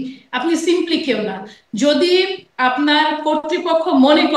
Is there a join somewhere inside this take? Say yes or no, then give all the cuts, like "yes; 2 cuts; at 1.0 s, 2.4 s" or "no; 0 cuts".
no; 0 cuts